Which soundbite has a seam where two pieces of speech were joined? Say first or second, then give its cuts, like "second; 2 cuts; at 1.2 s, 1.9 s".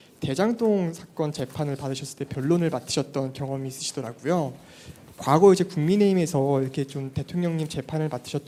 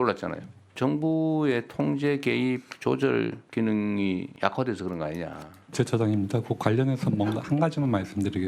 second; 4 cuts; at 0.8 s, 3.4 s, 4.3 s, 5.7 s